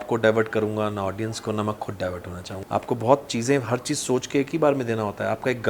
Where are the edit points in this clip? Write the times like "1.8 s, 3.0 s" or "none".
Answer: 2.5 s